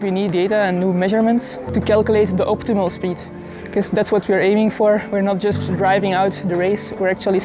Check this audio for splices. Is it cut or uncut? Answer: cut